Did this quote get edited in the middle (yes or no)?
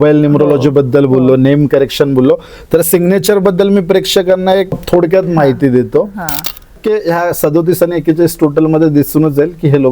yes